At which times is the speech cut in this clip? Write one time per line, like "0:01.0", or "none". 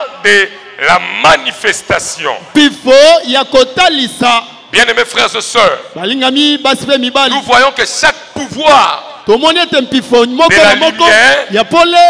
none